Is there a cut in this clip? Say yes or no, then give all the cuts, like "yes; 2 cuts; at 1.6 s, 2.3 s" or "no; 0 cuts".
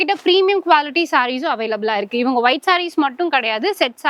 no; 0 cuts